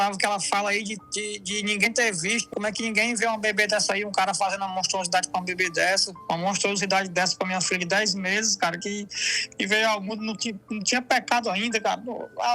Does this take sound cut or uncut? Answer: cut